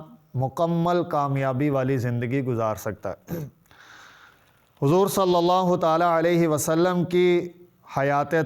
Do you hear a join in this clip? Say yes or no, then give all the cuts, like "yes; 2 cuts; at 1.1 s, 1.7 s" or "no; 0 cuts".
no; 0 cuts